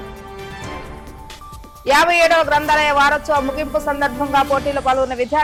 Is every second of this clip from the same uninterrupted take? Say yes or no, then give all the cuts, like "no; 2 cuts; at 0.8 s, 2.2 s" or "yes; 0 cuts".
yes; 0 cuts